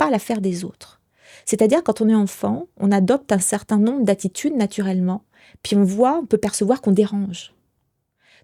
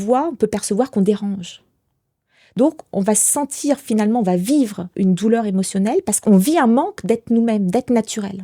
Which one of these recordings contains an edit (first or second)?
second